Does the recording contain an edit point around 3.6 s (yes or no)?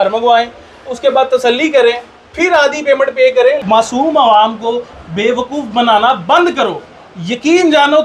yes